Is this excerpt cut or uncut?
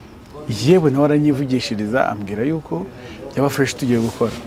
uncut